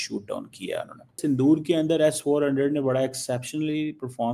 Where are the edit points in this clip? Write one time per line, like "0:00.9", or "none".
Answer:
0:01.2

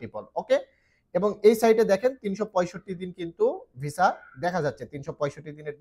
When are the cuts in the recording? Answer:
none

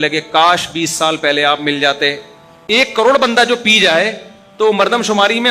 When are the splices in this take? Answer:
0:02.9

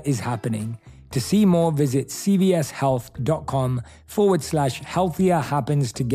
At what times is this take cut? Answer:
none

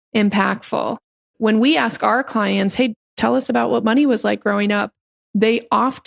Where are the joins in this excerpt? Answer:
0:01.3

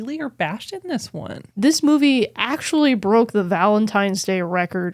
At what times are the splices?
0:01.5

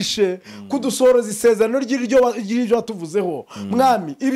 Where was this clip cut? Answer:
none

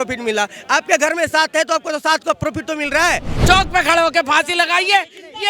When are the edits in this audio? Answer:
0:03.3

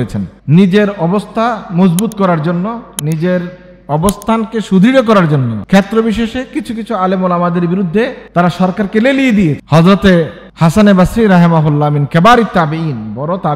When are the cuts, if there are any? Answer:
0:05.5
0:08.2
0:09.6

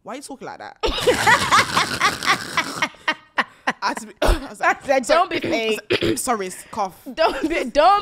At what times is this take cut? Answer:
none

